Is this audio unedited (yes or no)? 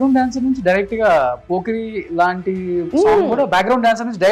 yes